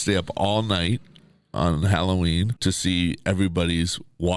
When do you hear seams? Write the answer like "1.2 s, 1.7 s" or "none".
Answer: 2.5 s